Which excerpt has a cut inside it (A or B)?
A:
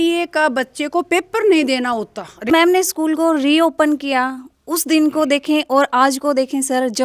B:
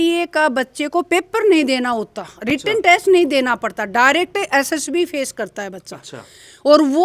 A